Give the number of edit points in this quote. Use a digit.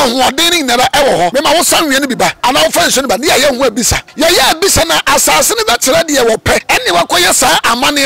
2